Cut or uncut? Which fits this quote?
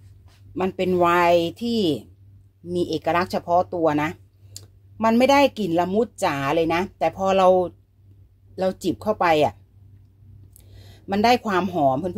uncut